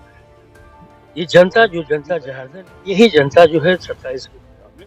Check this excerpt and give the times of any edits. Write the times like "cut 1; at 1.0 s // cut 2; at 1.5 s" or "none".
cut 1; at 2.2 s